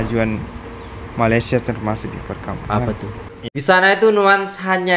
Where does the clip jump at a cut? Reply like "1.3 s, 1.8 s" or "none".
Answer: 3.2 s